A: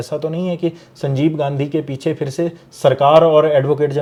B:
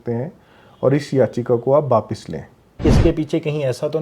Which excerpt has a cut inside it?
B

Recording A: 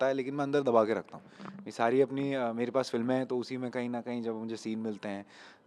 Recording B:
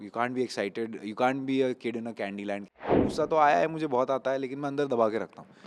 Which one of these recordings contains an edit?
B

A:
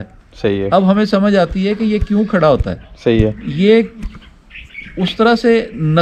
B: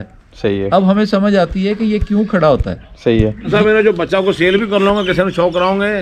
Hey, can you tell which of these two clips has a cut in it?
B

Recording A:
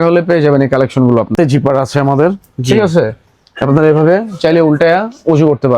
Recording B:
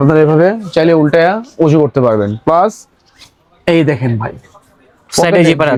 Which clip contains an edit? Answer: A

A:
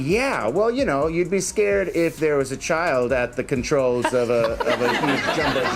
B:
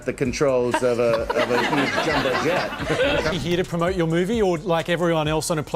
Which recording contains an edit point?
B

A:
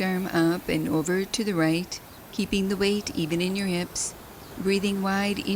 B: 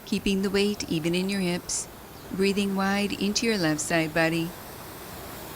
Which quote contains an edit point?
B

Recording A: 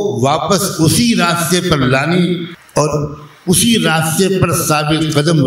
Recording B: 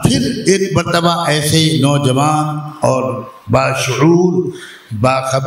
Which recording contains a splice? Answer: A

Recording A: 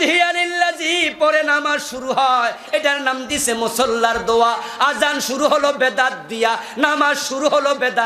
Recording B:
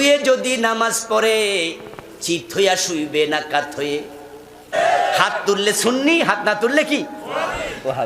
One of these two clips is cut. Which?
B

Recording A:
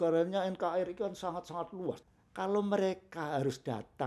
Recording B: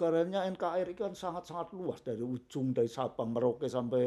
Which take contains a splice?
A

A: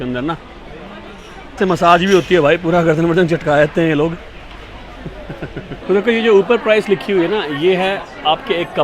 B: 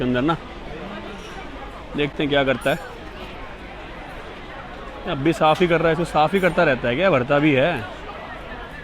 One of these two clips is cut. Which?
A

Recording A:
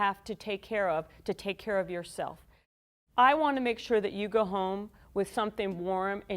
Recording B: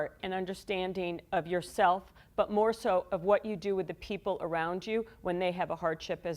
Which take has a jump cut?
A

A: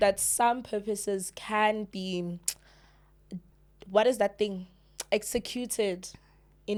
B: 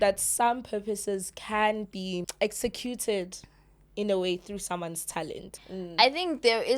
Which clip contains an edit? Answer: B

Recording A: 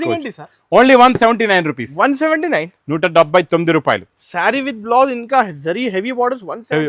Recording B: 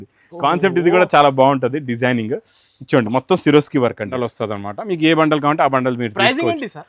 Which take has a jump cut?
B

